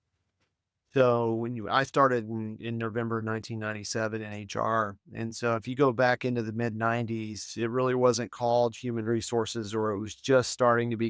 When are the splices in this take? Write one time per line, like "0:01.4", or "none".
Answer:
none